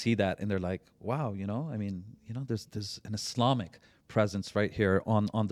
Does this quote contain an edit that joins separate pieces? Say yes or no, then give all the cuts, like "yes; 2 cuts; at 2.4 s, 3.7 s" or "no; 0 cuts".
no; 0 cuts